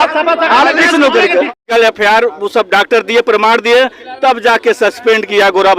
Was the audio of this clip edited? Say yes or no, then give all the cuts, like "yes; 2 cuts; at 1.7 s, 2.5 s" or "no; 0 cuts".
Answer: yes; 1 cut; at 1.5 s